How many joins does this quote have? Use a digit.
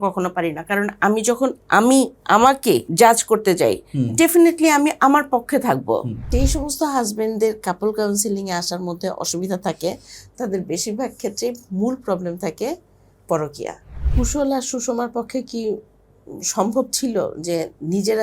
3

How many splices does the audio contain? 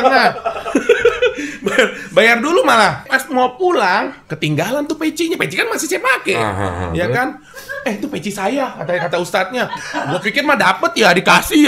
1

